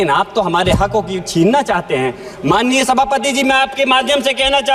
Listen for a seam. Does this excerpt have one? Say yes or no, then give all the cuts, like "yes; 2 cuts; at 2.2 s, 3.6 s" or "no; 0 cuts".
no; 0 cuts